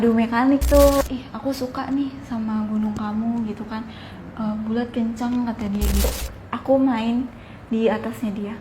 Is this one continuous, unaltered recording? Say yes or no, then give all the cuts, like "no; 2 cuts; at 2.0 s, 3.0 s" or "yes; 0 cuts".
no; 2 cuts; at 1.0 s, 6.1 s